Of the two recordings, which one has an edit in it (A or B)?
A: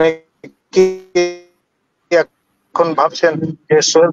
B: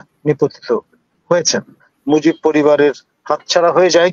B